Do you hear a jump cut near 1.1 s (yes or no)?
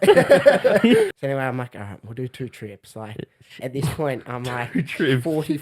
yes